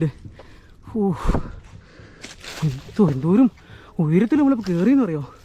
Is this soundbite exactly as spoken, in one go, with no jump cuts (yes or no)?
yes